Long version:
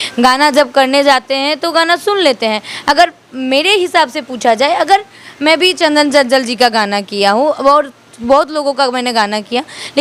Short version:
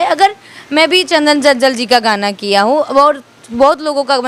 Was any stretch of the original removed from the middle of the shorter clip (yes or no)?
no